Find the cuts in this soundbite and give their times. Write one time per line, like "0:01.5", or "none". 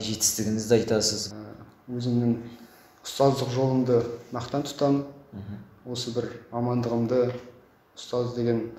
0:01.2

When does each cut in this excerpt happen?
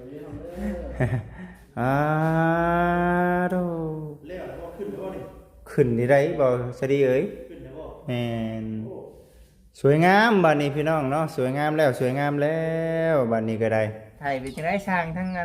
0:14.2

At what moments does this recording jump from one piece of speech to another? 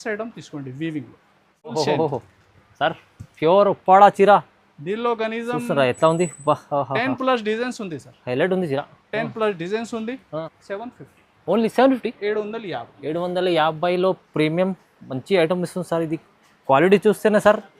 0:01.7
0:10.4

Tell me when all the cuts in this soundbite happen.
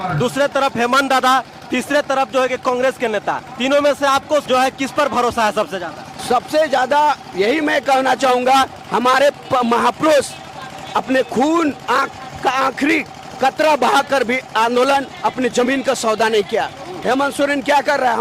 none

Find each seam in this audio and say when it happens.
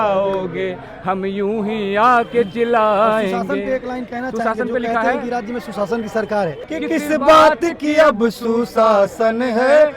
0:06.6

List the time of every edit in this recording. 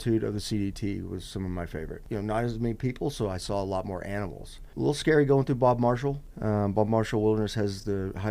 0:02.0
0:04.6
0:06.3

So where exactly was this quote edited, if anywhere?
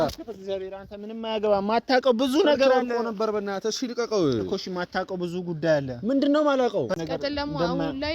0:07.0

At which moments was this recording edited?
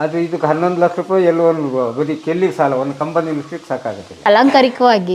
0:04.2

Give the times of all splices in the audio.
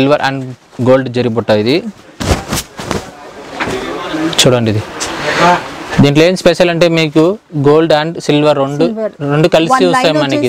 none

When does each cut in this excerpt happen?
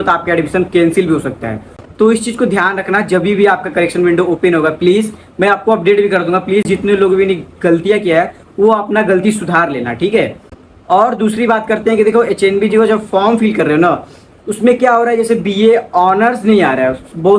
none

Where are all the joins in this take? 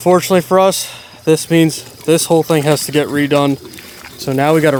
none

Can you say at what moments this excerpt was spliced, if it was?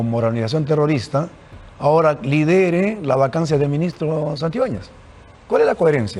none

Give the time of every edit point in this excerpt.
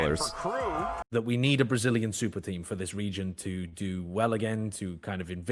0:01.0

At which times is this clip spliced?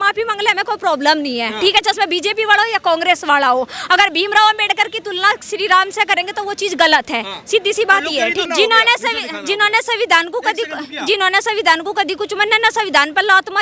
0:08.5

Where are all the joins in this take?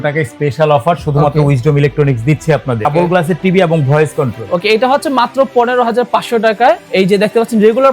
0:02.9
0:06.9

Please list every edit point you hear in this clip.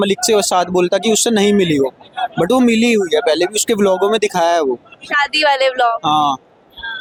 none

